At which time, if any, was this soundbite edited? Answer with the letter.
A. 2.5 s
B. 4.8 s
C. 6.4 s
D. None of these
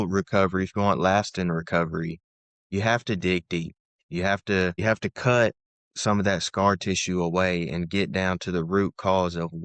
B